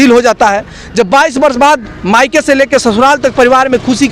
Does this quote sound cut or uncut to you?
uncut